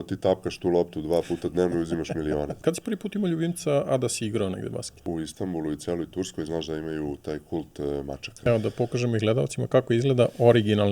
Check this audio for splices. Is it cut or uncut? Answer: cut